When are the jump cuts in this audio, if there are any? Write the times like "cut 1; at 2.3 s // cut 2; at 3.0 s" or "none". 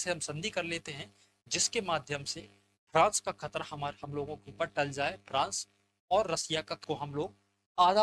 cut 1; at 6.8 s